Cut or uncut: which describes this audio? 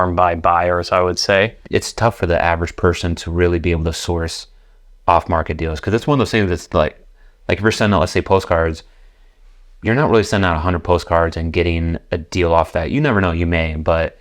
cut